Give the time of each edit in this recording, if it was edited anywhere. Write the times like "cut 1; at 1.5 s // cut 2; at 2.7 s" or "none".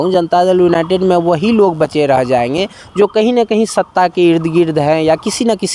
none